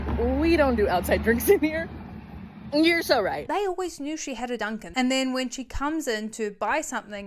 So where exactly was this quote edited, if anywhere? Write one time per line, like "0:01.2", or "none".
0:03.5
0:04.8

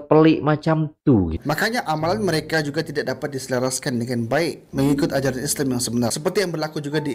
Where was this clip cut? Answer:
0:01.4
0:06.2

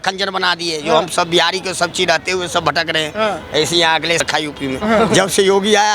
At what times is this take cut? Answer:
0:04.2

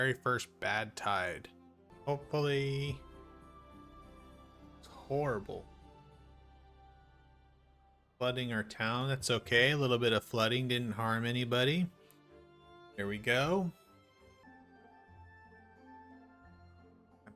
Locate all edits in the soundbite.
0:01.9
0:14.4

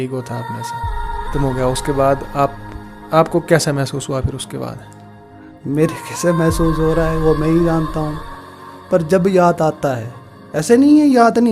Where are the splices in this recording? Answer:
0:01.3

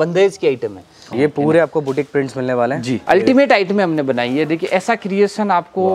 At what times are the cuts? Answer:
0:01.1
0:03.0

